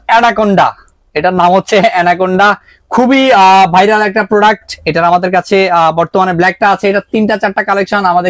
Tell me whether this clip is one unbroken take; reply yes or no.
yes